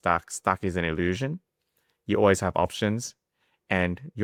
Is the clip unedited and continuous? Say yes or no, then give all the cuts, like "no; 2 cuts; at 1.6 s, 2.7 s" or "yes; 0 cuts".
yes; 0 cuts